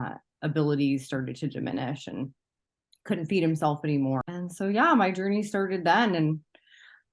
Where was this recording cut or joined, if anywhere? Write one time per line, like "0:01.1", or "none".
0:04.2

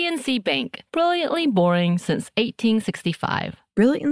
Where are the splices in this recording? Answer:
none

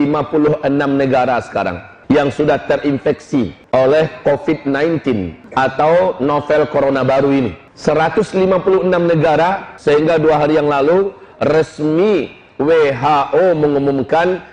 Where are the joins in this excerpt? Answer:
0:01.9
0:03.6
0:05.4
0:07.6
0:09.7

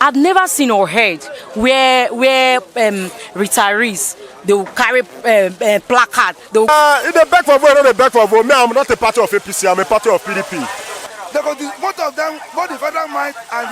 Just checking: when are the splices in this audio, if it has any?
0:06.7
0:11.1

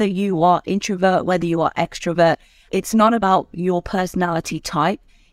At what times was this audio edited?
0:02.7

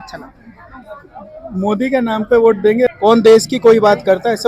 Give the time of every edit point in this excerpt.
0:02.9

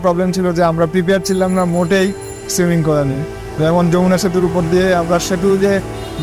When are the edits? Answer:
none

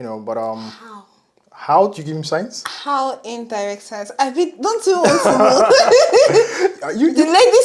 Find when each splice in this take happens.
none

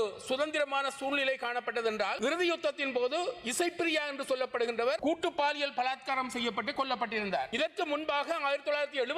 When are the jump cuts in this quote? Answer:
0:02.1
0:05.0
0:07.5

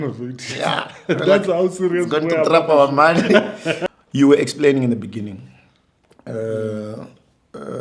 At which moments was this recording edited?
0:03.8

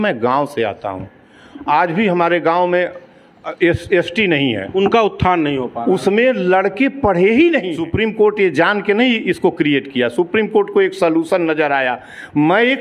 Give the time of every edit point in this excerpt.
0:07.8

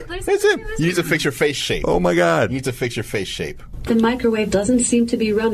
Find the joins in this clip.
0:03.8

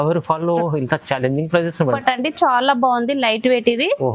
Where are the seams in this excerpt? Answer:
0:02.0

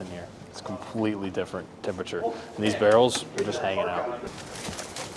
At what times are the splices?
0:04.3

